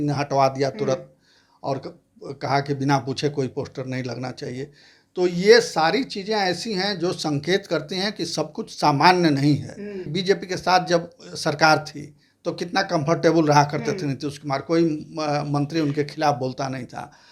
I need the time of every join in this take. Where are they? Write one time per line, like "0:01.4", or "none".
0:10.1